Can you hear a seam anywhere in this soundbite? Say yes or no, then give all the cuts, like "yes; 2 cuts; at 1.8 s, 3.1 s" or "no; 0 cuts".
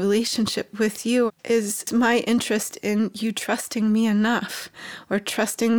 yes; 1 cut; at 1.4 s